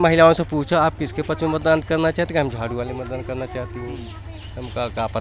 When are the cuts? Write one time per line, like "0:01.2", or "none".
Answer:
none